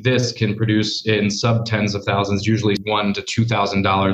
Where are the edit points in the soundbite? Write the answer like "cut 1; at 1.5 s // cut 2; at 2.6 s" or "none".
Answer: cut 1; at 2.8 s